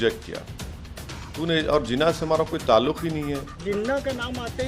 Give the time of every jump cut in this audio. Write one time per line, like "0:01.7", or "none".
0:03.6